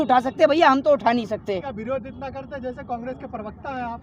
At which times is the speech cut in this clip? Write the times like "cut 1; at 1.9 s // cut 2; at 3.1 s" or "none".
cut 1; at 1.7 s